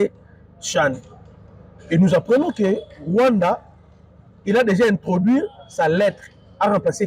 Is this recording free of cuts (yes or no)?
yes